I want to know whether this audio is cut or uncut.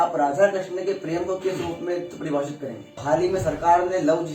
cut